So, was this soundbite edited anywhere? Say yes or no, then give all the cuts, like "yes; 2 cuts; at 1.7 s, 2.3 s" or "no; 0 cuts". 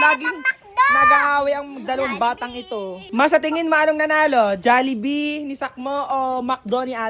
yes; 1 cut; at 3.0 s